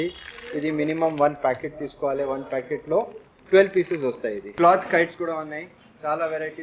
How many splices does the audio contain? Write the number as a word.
one